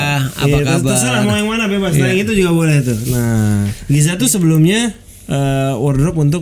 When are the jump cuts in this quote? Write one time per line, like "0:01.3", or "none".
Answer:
0:03.8